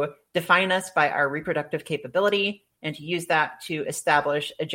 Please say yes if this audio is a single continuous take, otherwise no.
yes